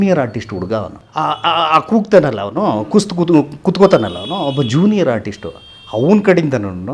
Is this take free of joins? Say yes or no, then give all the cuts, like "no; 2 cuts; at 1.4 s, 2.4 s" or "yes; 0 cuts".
no; 1 cut; at 1.0 s